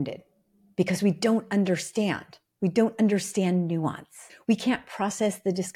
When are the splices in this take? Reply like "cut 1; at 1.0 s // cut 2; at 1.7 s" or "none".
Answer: cut 1; at 4.3 s